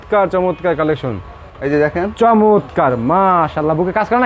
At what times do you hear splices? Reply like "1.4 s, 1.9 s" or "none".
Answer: 1.6 s